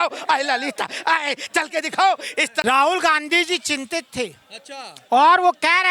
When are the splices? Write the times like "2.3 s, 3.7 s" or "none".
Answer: 2.6 s